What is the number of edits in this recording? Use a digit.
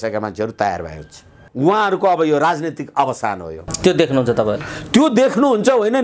2